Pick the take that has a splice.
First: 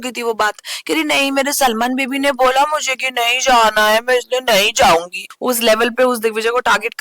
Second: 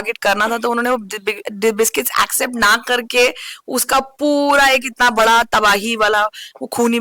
first; 1 cut; at 5.2 s

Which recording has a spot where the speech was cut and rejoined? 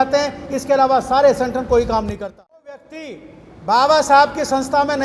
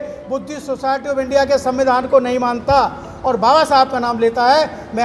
first; 1 cut; at 2.9 s

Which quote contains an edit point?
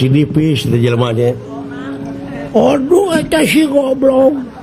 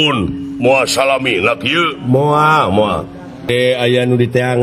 second; 1 cut; at 3.5 s

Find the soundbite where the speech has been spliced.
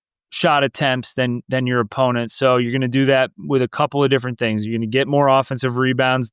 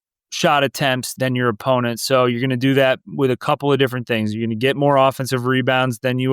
second; 1 cut; at 1.1 s

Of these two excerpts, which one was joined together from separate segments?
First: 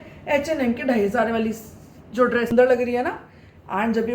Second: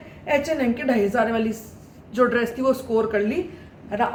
first; 1 cut; at 2.5 s

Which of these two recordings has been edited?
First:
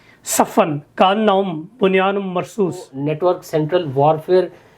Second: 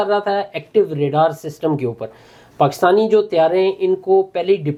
first; 1 cut; at 2.9 s

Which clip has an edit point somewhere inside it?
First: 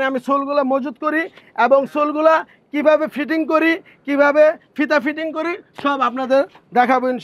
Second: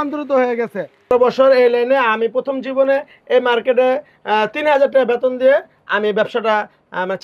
second; 1 cut; at 1.1 s

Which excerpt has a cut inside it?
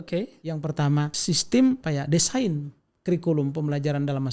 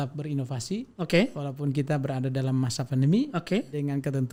first; 2 cuts; at 1.2 s, 1.8 s

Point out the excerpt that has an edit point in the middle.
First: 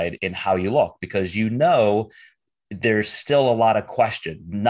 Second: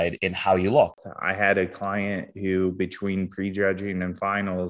second; 1 cut; at 1.0 s

